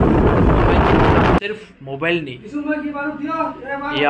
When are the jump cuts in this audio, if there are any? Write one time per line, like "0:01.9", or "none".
0:01.4